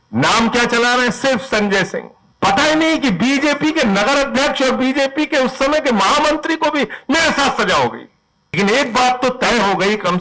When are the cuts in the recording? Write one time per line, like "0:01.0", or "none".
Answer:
0:02.2
0:08.6